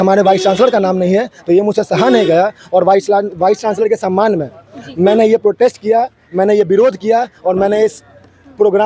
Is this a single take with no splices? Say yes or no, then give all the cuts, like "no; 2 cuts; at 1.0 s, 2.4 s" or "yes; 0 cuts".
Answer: yes; 0 cuts